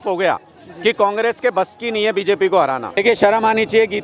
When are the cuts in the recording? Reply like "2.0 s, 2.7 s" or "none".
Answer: 3.0 s